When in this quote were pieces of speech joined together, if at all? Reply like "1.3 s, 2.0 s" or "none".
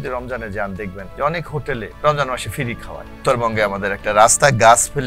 1.0 s, 1.9 s, 3.2 s